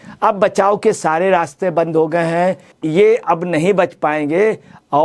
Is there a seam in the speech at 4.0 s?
no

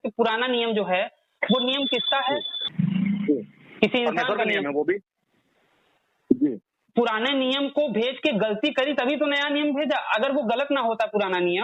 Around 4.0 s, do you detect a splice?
no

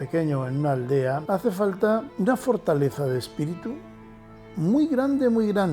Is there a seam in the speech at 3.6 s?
no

